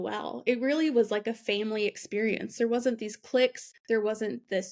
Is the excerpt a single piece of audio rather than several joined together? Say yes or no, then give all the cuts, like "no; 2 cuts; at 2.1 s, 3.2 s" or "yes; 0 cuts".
no; 1 cut; at 3.7 s